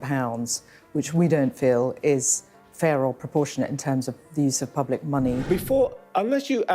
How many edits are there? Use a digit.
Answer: 1